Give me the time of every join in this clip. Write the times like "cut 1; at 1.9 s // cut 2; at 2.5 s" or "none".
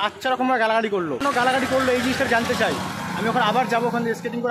cut 1; at 1.2 s